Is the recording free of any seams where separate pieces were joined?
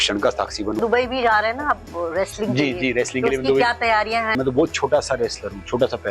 no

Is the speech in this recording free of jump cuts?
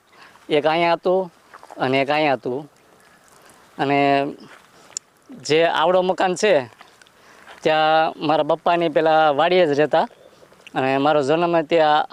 yes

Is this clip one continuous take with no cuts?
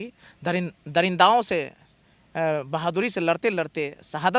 yes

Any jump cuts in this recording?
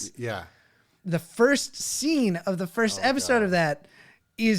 yes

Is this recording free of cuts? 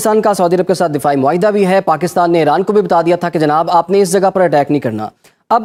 yes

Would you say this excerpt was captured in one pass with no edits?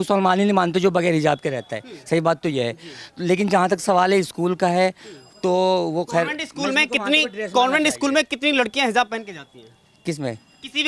yes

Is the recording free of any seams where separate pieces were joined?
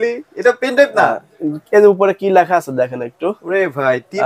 yes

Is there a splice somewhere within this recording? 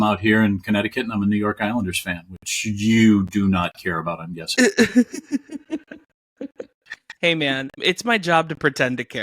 yes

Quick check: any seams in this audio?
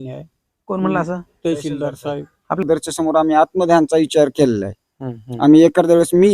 yes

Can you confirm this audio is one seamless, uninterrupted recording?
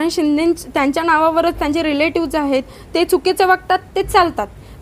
yes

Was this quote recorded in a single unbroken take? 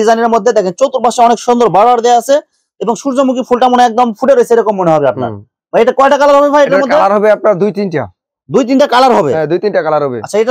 yes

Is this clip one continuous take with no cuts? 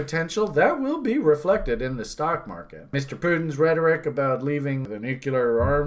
no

